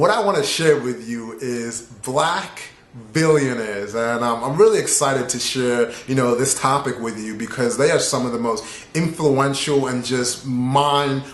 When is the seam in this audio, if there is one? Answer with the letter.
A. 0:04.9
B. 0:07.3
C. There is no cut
B